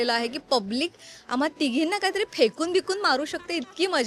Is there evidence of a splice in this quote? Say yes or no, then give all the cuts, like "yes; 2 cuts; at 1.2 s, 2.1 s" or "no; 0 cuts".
no; 0 cuts